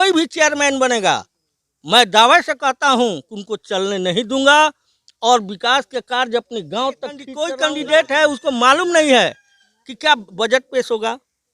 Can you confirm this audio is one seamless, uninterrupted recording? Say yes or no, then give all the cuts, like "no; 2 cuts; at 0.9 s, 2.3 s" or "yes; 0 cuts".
no; 1 cut; at 7.3 s